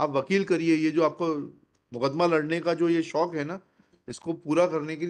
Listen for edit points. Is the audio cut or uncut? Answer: uncut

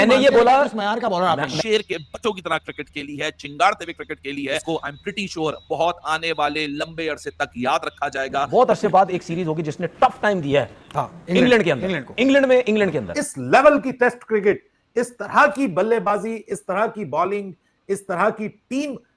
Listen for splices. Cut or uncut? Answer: cut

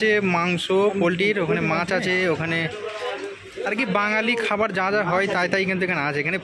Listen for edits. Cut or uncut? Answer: uncut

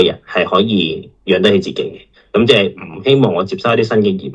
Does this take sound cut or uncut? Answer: uncut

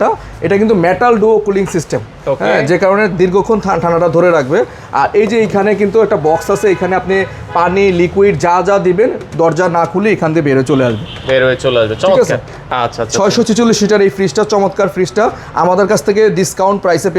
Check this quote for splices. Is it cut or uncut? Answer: uncut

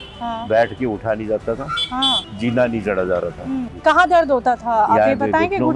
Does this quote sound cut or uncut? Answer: cut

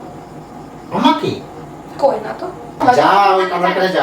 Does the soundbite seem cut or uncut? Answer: cut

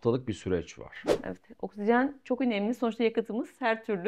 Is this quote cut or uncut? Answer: cut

